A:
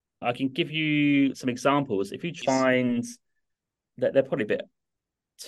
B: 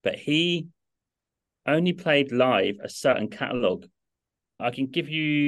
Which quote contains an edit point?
A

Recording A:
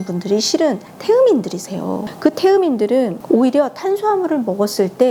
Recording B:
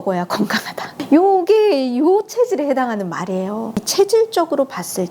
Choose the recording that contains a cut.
B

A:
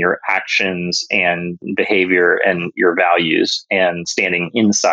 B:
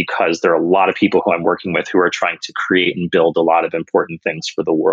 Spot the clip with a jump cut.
A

